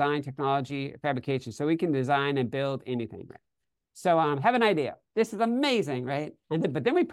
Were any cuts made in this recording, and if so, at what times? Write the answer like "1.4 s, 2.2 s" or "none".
none

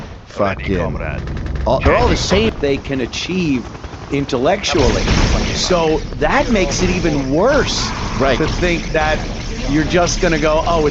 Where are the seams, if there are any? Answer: 2.5 s

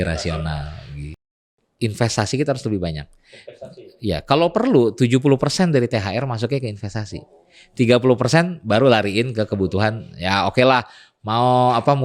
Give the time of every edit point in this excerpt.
1.3 s

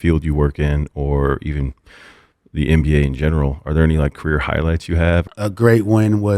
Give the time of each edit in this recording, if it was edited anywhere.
5.3 s

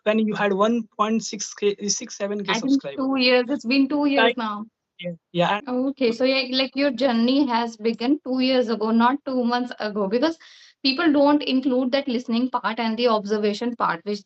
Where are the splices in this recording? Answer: 5.6 s

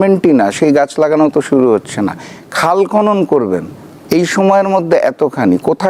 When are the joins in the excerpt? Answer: none

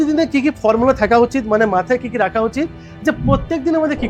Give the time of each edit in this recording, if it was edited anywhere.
none

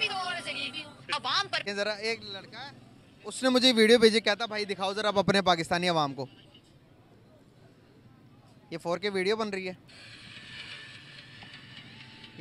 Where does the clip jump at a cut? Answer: 1.6 s

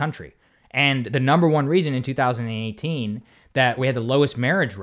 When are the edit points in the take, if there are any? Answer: 3.8 s

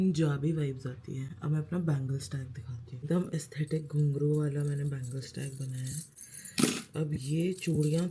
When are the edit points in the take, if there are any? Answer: none

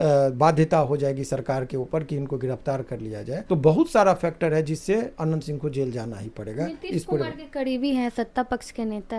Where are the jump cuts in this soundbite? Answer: 3.4 s

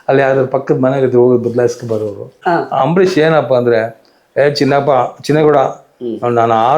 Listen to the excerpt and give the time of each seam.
2.3 s

